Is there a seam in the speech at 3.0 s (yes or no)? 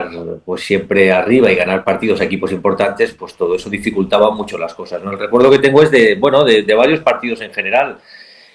no